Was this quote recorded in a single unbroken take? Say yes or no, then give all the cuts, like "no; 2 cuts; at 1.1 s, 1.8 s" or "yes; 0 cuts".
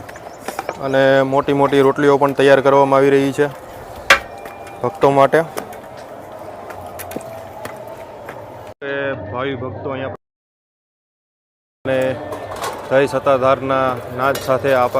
no; 1 cut; at 8.6 s